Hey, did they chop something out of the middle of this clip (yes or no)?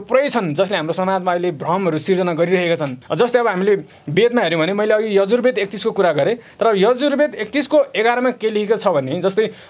no